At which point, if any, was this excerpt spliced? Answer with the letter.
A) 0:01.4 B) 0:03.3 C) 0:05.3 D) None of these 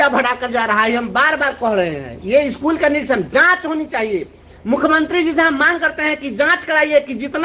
D